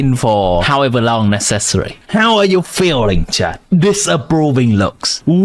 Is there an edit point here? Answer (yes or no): no